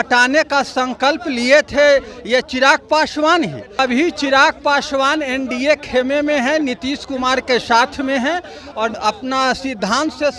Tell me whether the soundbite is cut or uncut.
cut